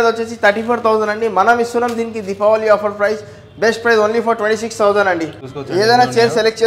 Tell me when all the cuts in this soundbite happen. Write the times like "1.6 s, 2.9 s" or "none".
5.4 s